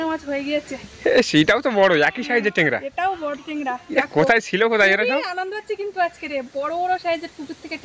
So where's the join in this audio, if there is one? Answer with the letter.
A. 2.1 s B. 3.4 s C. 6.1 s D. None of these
D